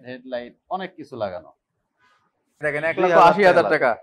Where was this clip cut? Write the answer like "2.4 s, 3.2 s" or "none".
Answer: 2.6 s